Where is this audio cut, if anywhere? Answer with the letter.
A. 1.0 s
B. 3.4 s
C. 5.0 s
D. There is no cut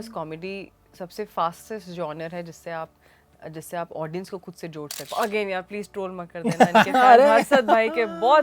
C